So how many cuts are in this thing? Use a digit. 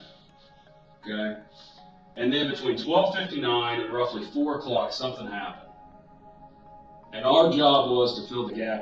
0